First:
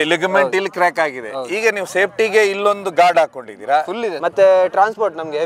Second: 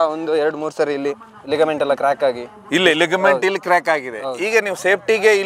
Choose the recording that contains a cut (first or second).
first